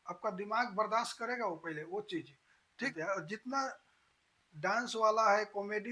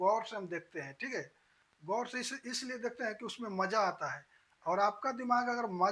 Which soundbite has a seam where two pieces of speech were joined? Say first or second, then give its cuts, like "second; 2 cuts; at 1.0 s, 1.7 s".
first; 1 cut; at 2.9 s